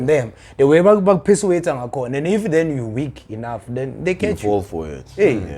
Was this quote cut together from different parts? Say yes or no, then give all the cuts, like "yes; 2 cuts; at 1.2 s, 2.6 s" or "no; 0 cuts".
no; 0 cuts